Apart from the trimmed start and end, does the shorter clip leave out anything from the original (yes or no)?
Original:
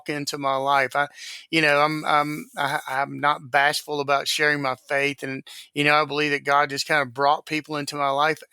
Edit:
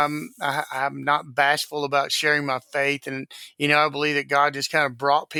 no